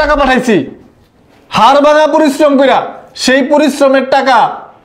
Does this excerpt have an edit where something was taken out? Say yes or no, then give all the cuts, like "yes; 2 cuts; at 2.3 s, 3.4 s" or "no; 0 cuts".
no; 0 cuts